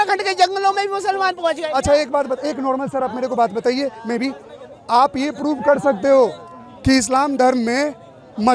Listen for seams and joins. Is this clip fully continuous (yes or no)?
yes